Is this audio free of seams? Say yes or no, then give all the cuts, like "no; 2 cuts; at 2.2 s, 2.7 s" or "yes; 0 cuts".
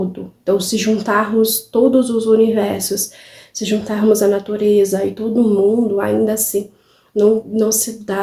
yes; 0 cuts